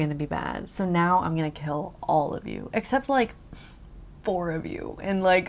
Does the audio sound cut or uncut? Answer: uncut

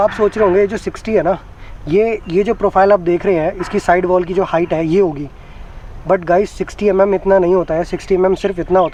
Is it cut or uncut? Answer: uncut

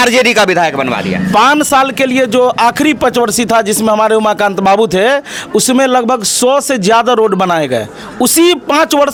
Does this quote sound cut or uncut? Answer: uncut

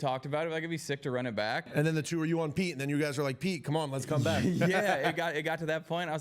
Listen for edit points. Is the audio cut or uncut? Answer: cut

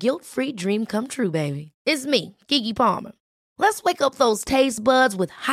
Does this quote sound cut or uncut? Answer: uncut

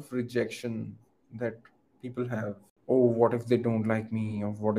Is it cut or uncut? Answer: cut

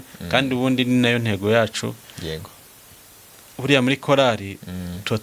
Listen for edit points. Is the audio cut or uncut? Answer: uncut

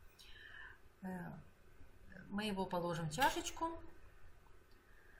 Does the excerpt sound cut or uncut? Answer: cut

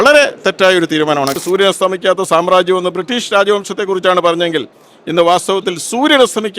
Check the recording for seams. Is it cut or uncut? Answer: cut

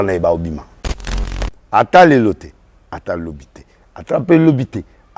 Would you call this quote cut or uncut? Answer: cut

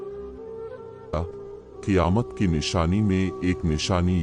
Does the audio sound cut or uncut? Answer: uncut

